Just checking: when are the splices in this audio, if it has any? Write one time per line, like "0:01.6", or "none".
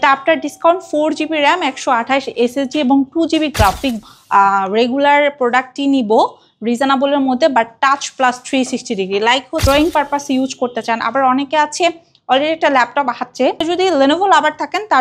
0:04.0
0:09.6
0:13.6